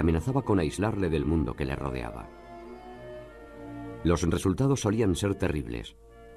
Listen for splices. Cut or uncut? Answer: uncut